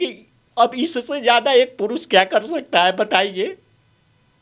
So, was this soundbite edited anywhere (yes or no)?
no